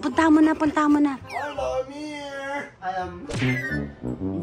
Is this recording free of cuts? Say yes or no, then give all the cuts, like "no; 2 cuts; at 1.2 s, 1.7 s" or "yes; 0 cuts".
yes; 0 cuts